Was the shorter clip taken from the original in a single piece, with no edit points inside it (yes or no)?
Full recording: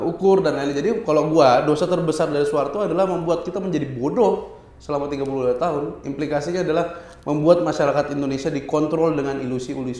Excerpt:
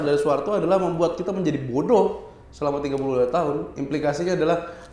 yes